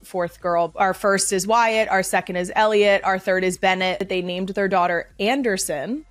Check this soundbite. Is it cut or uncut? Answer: uncut